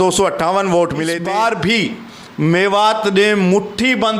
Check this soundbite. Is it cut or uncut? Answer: cut